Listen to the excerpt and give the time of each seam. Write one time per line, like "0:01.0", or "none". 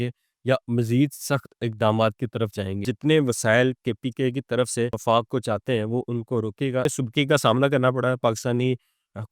0:02.9
0:05.0
0:06.9